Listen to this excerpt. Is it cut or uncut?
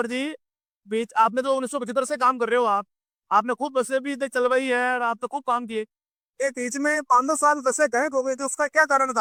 uncut